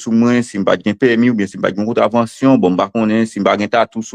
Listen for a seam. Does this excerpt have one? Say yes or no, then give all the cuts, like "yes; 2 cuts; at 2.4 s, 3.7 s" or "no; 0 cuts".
no; 0 cuts